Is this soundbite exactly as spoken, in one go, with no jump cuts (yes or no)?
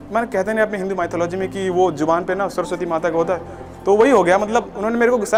yes